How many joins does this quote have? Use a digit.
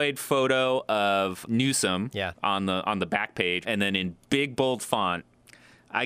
2